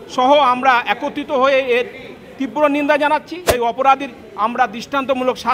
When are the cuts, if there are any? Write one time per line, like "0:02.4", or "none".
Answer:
0:03.4